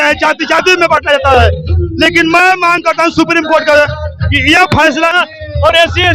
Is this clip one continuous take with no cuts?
no; 1 cut; at 5.1 s

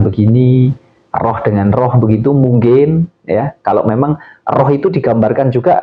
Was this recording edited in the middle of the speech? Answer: no; 0 cuts

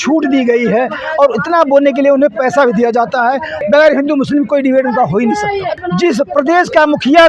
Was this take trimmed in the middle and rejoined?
yes; 2 cuts; at 3.6 s, 5.7 s

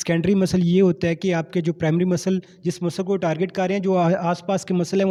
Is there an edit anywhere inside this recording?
no; 0 cuts

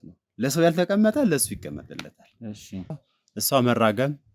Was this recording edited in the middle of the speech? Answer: yes; 1 cut; at 3.0 s

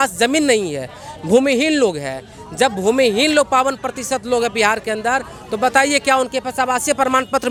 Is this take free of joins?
yes; 0 cuts

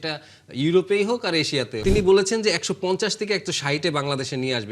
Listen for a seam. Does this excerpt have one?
yes; 1 cut; at 1.8 s

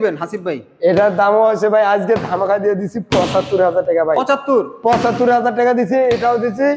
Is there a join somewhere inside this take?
no; 0 cuts

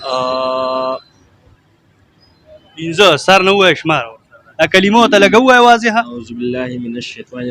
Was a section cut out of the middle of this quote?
yes; 1 cut; at 4.4 s

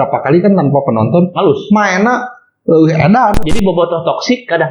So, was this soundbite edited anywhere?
yes; 1 cut; at 3.4 s

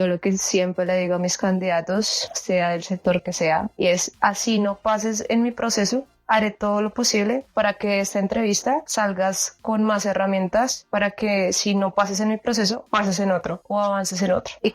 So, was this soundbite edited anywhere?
yes; 1 cut; at 3.7 s

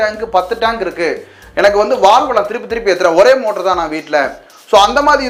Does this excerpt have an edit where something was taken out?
no; 0 cuts

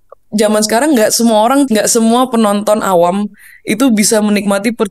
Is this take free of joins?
no; 1 cut; at 1.7 s

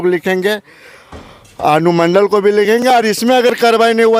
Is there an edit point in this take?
no; 0 cuts

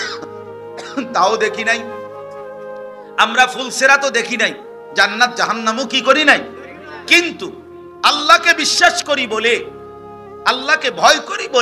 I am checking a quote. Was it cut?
yes; 2 cuts; at 1.8 s, 3.1 s

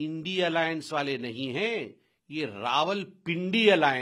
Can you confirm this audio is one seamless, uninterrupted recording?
yes; 0 cuts

